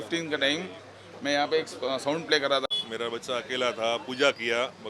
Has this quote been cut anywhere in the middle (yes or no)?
yes